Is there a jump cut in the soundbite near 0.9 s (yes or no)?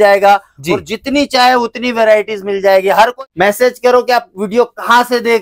no